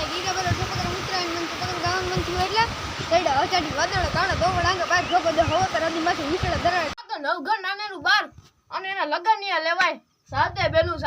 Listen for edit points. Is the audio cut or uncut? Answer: cut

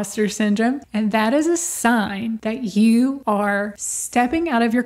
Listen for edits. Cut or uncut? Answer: cut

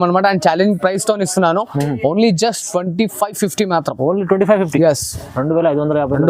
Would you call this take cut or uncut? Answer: uncut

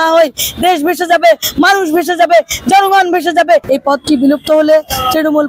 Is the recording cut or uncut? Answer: cut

